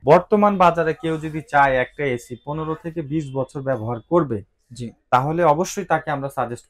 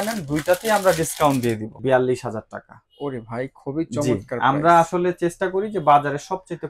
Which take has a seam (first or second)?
second